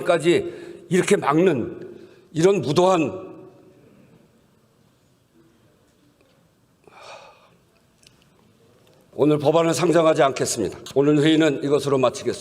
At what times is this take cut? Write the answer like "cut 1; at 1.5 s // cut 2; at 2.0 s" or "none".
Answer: cut 1; at 9.0 s // cut 2; at 10.8 s